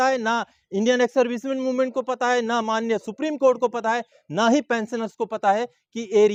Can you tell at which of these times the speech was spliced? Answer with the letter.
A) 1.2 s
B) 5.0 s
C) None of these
C